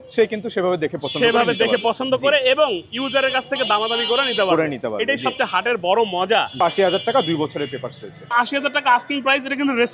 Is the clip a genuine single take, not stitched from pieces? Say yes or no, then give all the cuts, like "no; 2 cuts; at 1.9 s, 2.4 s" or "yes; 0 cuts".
no; 2 cuts; at 6.6 s, 8.3 s